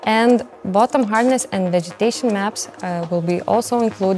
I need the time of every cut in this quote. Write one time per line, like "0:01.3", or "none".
none